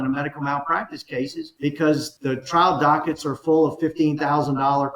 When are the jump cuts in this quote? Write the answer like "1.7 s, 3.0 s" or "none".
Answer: 1.5 s, 2.1 s